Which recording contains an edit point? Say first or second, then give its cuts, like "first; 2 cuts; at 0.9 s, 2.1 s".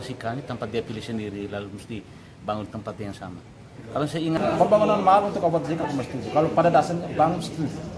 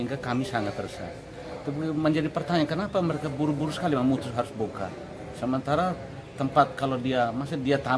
first; 1 cut; at 4.4 s